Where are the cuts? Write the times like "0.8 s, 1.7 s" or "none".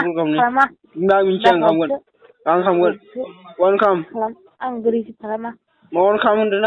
none